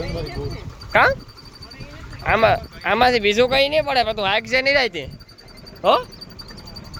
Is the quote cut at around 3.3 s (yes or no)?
no